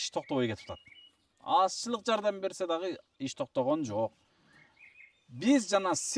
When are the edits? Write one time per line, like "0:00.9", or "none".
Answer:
none